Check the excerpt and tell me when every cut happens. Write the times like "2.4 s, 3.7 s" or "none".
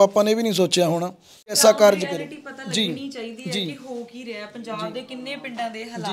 1.6 s